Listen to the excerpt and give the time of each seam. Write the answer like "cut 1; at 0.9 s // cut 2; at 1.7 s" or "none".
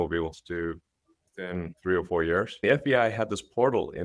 cut 1; at 1.7 s // cut 2; at 2.5 s